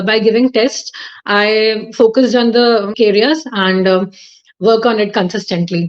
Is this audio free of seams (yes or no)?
no